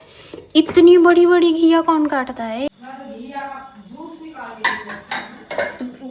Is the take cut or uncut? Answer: cut